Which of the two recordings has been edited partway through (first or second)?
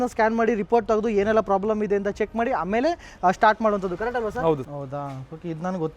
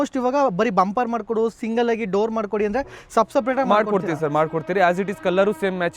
first